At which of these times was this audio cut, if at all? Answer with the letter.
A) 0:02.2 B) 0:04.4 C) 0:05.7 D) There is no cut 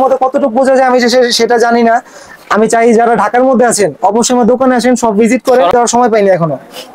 C